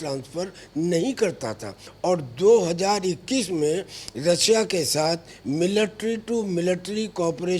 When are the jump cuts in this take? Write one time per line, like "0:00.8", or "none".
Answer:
0:01.8